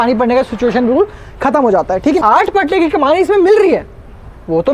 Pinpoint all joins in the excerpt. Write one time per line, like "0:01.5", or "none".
0:02.2